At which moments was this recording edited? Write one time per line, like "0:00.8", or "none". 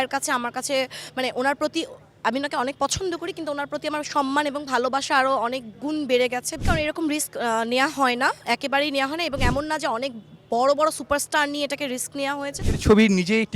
0:06.6
0:12.6